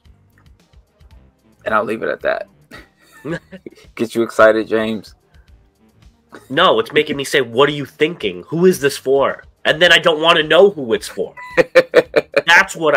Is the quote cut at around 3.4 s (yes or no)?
yes